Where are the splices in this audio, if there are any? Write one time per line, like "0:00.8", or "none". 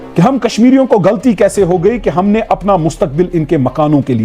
none